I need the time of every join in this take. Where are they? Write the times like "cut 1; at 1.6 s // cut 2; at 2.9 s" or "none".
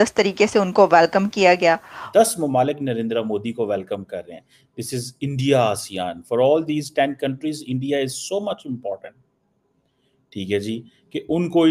cut 1; at 1.9 s